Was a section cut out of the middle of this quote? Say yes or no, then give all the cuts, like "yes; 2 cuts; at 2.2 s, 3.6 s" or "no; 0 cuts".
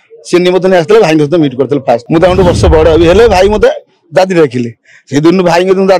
yes; 1 cut; at 2.0 s